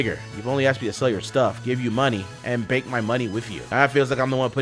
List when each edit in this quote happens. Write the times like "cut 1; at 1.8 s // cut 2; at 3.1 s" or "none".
none

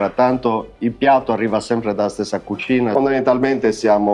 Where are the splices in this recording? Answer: cut 1; at 2.9 s

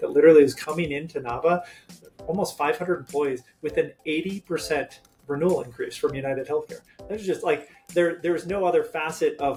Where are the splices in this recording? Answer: none

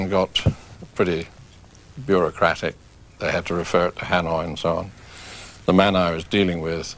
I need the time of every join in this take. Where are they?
cut 1; at 2.6 s

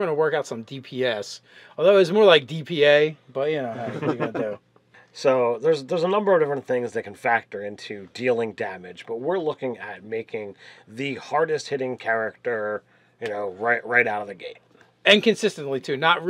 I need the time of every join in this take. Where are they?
cut 1; at 9.9 s

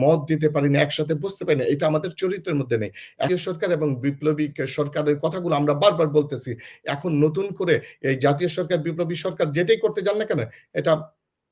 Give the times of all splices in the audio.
cut 1; at 3.3 s

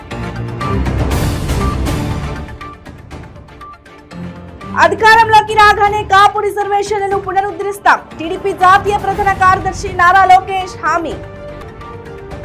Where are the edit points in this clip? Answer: none

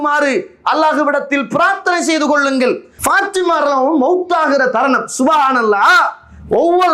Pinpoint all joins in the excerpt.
cut 1; at 2.9 s

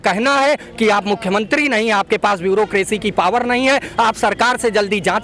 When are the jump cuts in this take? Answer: none

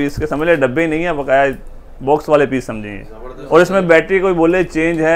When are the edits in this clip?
cut 1; at 3.4 s

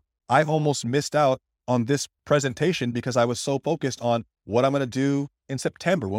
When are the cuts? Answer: cut 1; at 2.1 s

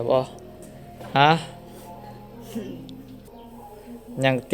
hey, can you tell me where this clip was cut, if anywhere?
cut 1; at 3.3 s

